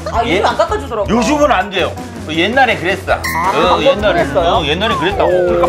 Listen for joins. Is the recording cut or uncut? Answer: uncut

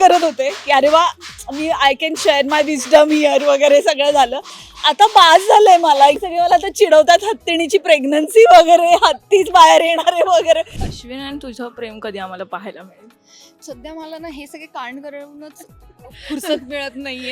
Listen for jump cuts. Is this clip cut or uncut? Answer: cut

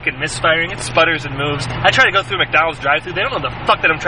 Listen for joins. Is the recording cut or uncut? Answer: uncut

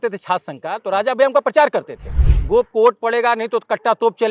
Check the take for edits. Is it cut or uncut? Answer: cut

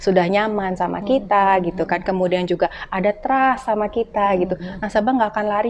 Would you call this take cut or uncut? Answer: uncut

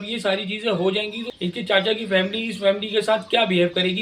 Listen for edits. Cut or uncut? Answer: cut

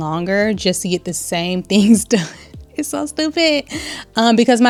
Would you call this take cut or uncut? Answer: uncut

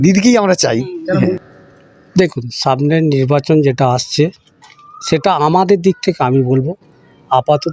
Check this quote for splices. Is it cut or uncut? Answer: cut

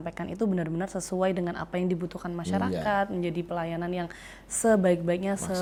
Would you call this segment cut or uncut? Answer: uncut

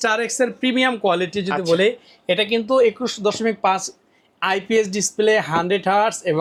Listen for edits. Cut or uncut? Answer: uncut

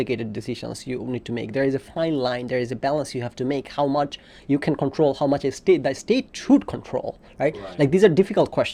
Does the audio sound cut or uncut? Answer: uncut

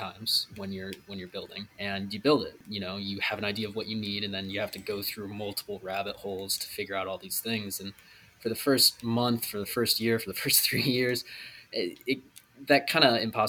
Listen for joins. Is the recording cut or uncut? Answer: cut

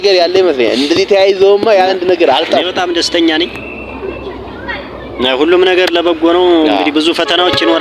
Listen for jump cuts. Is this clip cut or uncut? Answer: cut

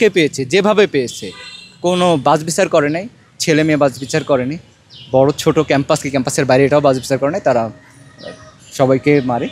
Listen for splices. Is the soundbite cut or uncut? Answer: uncut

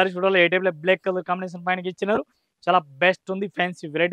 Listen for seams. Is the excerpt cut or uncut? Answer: uncut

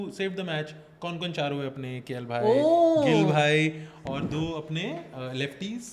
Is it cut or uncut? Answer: uncut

